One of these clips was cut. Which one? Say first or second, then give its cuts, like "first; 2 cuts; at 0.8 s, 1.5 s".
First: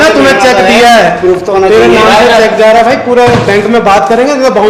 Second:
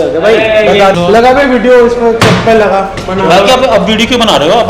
second; 1 cut; at 0.9 s